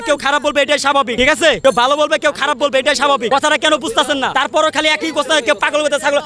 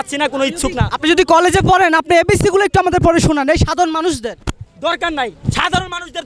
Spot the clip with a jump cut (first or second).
first